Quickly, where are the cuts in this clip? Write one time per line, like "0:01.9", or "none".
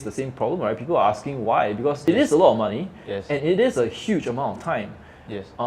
0:02.0